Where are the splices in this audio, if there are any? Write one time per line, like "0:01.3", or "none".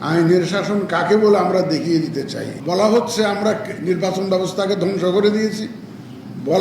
0:02.5